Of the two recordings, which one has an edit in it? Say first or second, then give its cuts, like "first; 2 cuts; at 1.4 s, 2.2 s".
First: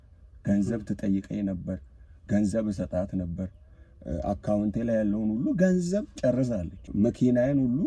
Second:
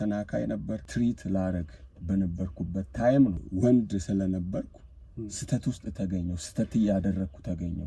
second; 2 cuts; at 0.9 s, 3.4 s